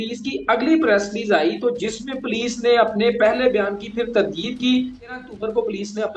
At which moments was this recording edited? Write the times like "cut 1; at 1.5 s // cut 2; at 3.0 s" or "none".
cut 1; at 5.2 s